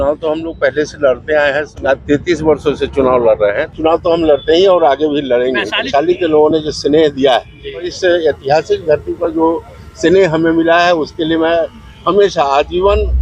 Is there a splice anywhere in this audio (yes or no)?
yes